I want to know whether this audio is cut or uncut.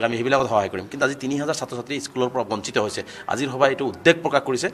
uncut